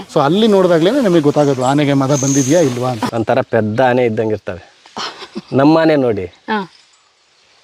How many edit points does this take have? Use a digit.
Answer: 1